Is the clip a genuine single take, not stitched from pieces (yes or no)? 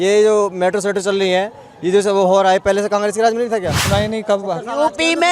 no